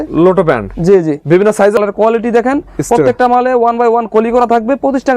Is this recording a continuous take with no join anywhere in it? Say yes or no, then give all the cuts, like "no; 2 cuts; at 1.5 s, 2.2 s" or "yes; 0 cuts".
no; 1 cut; at 1.8 s